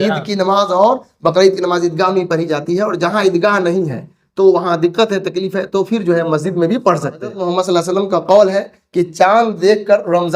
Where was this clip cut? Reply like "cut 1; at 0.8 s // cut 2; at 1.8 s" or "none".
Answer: cut 1; at 7.4 s